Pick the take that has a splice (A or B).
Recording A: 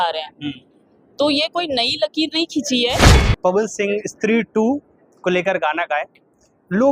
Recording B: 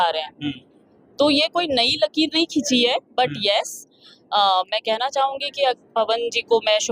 A